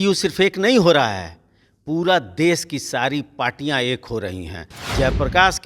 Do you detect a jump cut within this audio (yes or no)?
yes